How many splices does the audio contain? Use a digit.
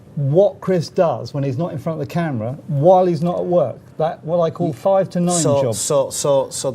1